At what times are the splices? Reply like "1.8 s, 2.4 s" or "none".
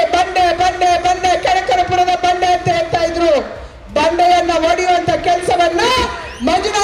none